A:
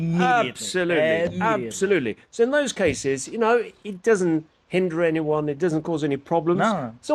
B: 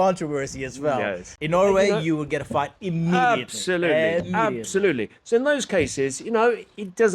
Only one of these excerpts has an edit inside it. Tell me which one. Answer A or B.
B